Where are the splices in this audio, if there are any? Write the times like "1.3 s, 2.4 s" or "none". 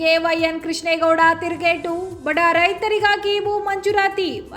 none

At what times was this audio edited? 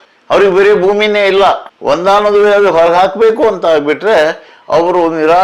none

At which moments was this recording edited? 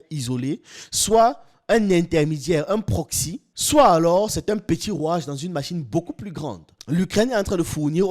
6.7 s

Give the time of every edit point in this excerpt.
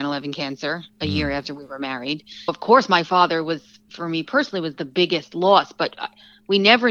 2.5 s

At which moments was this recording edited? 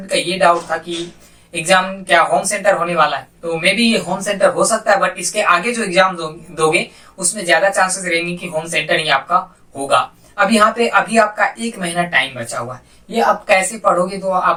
none

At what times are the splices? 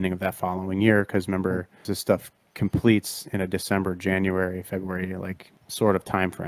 1.9 s, 5.6 s

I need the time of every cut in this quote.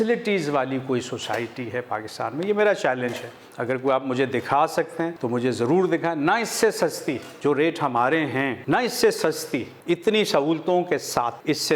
none

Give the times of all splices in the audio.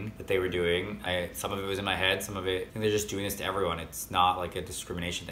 1.0 s, 2.7 s

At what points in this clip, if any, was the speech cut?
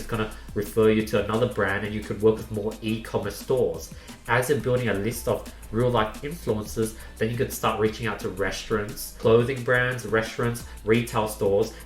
9.1 s

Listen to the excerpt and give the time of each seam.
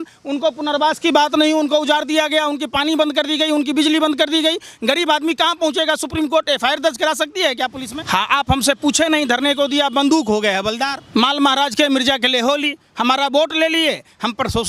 7.9 s, 11.0 s

